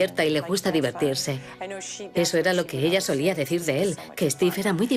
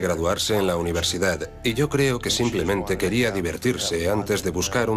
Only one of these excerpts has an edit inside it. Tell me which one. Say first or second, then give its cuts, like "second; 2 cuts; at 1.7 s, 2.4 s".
first; 1 cut; at 3.8 s